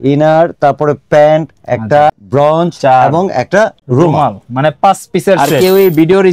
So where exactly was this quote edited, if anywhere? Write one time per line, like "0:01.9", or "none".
0:02.2
0:03.8
0:05.5

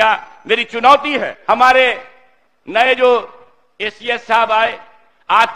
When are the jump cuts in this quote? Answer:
0:01.3

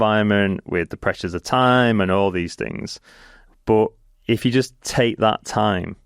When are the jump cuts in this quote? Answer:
0:04.1

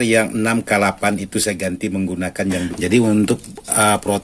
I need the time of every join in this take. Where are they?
0:02.7

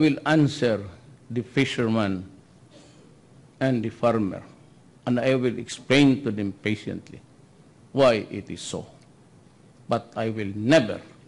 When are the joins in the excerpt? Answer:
none

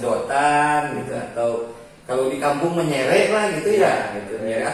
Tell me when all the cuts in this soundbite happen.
none

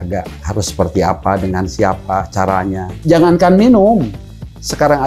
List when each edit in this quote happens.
0:02.9

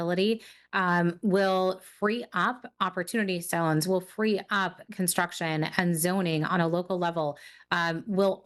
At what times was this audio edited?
none

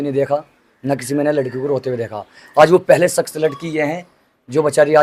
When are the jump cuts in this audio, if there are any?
none

